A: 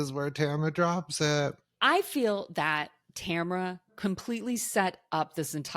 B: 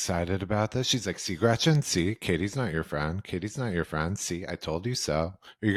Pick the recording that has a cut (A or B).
A